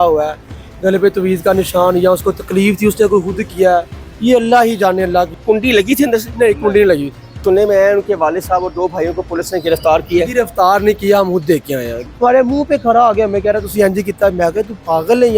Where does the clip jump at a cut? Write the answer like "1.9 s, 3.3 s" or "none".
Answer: 5.4 s, 7.4 s, 12.0 s